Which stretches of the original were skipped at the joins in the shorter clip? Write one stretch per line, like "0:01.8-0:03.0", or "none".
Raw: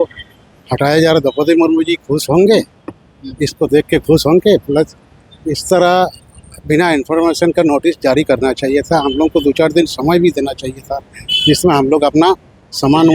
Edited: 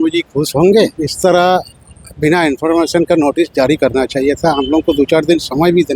0:02.8-0:05.5

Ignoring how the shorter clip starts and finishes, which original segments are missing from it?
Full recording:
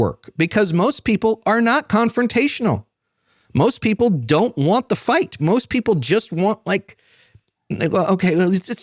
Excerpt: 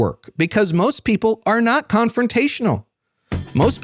none

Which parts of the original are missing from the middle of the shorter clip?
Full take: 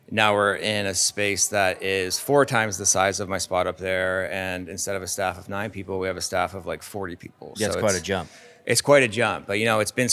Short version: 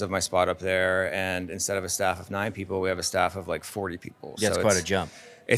none

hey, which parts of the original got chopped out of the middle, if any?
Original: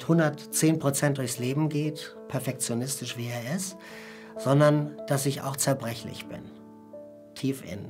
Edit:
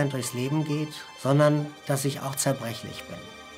0:02.1-0:04.3

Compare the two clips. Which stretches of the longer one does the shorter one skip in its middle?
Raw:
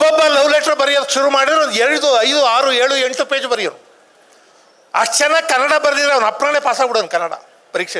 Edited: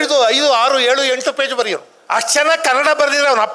0:03.9-0:04.8

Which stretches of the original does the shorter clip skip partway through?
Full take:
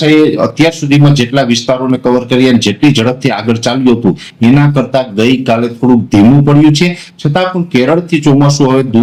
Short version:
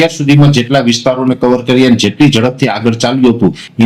none

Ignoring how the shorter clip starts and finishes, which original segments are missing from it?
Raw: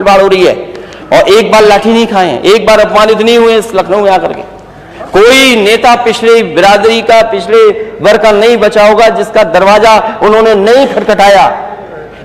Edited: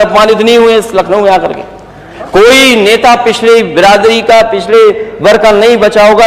none

